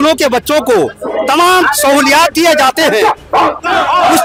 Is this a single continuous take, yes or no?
yes